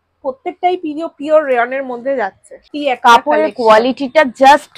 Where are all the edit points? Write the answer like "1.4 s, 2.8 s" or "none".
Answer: 2.7 s